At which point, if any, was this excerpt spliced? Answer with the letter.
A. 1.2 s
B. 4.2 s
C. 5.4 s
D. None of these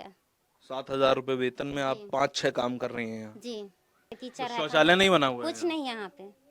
B